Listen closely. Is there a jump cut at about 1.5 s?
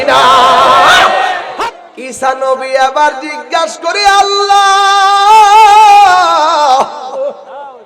yes; 1 cut; at 1.5 s

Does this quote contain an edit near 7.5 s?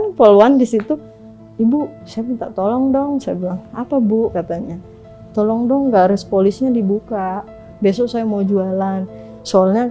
no; 0 cuts

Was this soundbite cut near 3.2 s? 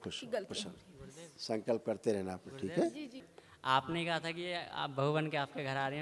yes; 1 cut; at 3.2 s

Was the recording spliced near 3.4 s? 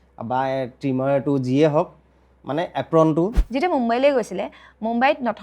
yes; 1 cut; at 3.4 s

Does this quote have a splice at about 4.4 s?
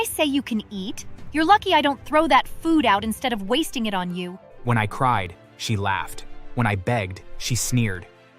yes; 1 cut; at 4.4 s

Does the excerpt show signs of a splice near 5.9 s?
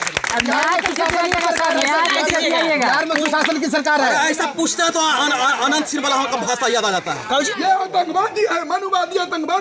no; 1 cut; at 7.5 s

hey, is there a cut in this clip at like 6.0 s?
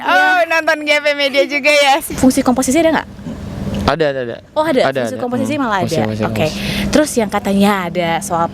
no; 1 cut; at 2.1 s

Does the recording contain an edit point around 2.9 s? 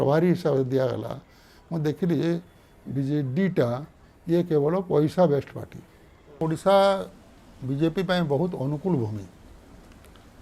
no; 1 cut; at 6.4 s

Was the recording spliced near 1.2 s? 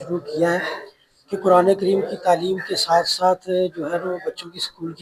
no; 0 cuts

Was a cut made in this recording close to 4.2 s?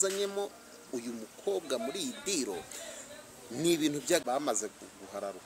yes; 1 cut; at 4.2 s

